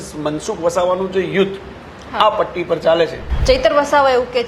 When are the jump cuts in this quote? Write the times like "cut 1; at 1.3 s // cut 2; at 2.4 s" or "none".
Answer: cut 1; at 3.3 s